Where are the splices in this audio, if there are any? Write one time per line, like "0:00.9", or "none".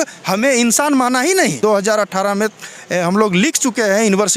0:01.6

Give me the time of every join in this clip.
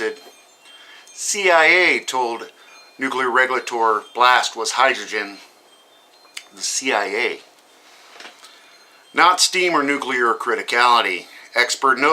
0:05.0

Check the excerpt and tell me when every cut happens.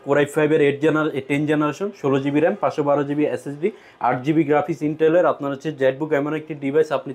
none

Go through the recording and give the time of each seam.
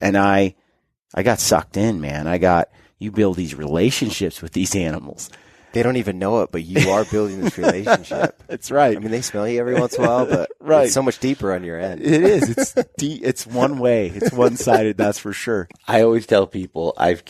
0:15.7

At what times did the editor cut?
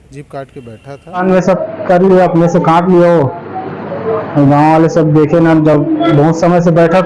0:01.2

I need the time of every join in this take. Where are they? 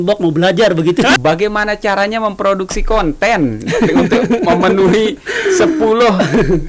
0:01.2

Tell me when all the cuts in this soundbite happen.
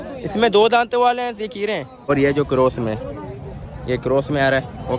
0:01.9

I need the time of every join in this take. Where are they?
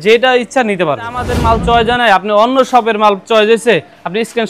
0:01.3

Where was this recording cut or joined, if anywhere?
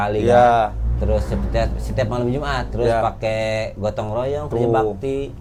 none

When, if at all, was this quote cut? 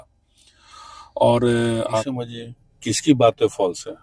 0:02.1

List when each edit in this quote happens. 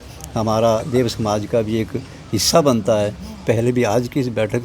0:03.4

